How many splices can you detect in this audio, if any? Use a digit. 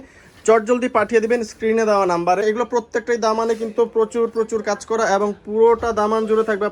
1